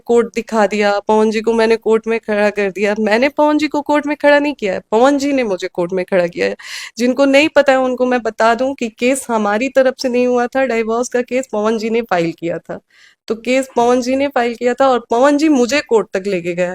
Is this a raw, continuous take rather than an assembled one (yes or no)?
yes